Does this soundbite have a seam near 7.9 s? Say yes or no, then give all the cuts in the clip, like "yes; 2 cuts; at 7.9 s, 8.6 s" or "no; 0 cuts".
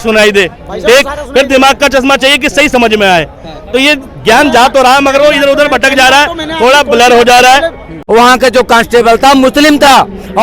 yes; 1 cut; at 7.9 s